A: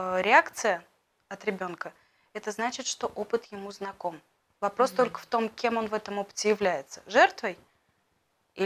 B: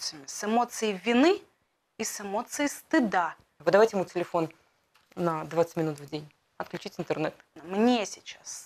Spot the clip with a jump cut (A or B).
B